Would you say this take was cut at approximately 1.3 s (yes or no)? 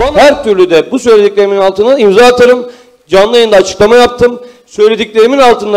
no